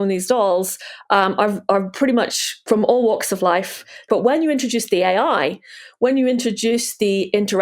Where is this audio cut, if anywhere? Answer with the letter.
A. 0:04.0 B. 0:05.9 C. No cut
A